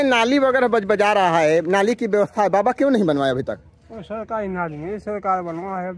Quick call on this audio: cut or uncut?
uncut